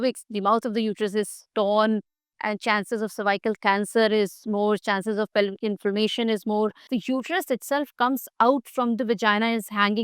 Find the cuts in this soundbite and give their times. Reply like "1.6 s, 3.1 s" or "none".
6.9 s